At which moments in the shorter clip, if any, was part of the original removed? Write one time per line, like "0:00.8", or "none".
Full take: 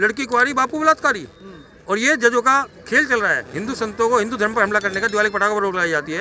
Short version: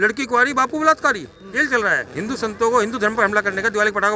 0:01.5